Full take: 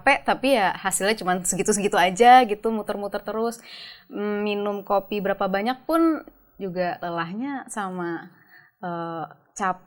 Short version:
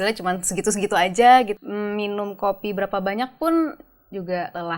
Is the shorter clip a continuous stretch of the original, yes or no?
no